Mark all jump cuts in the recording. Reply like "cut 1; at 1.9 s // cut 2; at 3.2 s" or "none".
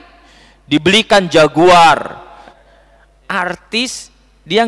cut 1; at 2.6 s